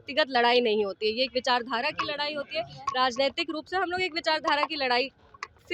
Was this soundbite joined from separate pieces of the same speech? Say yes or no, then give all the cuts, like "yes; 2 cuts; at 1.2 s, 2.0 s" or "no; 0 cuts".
no; 0 cuts